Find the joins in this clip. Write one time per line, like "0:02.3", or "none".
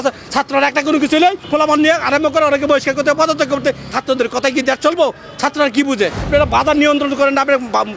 0:01.4
0:03.9
0:06.3